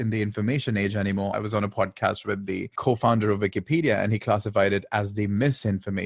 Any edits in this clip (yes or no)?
yes